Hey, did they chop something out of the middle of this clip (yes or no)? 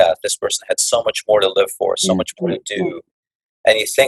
no